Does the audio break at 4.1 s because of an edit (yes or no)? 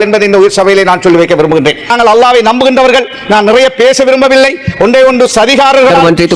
no